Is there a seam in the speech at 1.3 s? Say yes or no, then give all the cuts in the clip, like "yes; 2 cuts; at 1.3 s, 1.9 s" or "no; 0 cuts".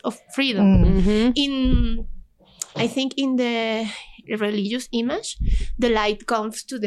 no; 0 cuts